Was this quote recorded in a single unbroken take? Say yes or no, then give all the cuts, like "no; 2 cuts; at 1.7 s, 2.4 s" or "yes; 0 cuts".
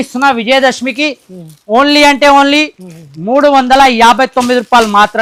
yes; 0 cuts